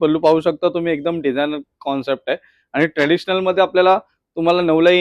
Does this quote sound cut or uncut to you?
uncut